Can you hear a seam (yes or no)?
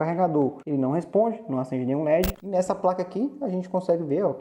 yes